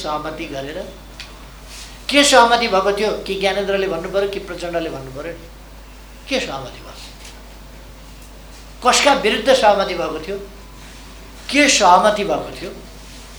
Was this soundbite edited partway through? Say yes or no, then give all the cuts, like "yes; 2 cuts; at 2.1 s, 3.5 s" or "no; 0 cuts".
no; 0 cuts